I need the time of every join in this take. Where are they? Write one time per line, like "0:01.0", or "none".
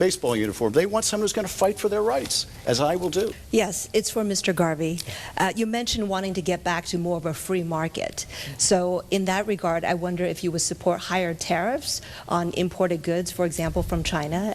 none